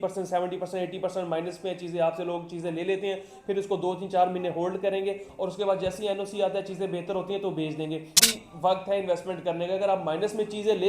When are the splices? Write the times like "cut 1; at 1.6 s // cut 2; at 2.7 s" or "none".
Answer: cut 1; at 8.2 s

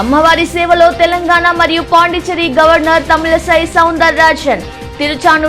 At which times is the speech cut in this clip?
none

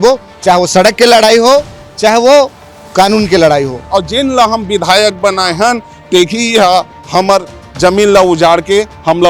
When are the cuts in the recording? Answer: cut 1; at 3.8 s

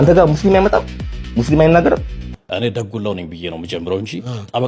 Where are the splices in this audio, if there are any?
cut 1; at 2.5 s

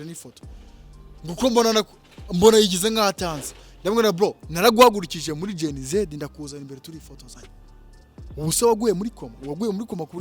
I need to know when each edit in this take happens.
cut 1; at 9.3 s

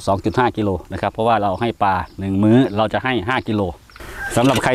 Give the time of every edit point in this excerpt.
none

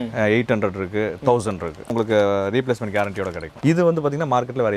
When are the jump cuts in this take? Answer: cut 1; at 1.9 s // cut 2; at 3.5 s

